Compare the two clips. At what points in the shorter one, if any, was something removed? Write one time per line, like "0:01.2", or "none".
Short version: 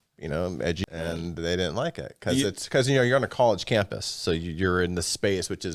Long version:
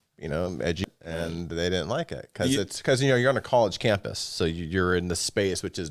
0:00.9